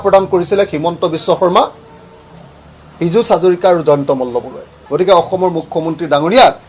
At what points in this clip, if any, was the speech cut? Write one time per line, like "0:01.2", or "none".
0:04.8